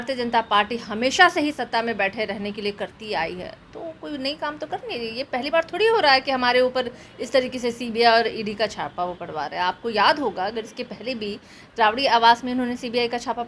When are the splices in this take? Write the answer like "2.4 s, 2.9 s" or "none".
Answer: none